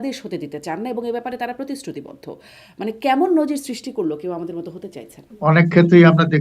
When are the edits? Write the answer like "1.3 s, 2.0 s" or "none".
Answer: 5.2 s